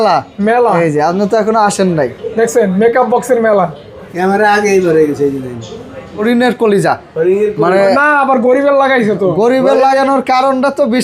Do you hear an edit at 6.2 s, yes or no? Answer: yes